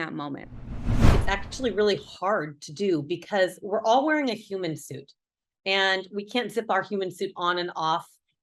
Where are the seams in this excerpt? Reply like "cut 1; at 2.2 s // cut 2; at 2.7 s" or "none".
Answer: cut 1; at 1.1 s